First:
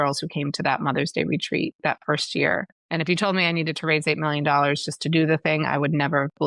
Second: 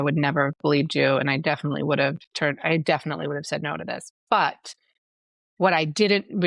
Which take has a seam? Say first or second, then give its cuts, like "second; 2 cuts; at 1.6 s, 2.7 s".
first; 1 cut; at 2.8 s